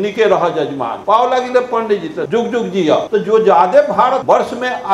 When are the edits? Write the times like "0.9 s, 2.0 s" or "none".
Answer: 0.9 s, 2.3 s, 3.1 s, 4.2 s